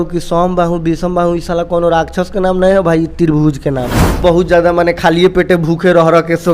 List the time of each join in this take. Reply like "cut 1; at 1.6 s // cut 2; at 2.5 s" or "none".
cut 1; at 4.2 s